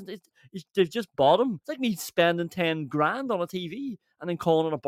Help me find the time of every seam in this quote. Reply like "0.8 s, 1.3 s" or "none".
1.7 s